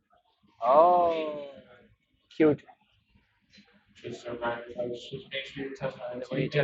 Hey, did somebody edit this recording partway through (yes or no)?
no